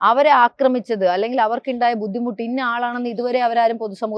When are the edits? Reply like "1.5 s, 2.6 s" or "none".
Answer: none